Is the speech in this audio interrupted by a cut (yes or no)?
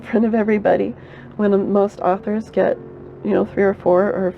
no